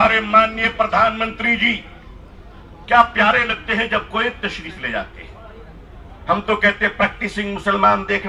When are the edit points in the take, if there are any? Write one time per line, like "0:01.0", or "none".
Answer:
none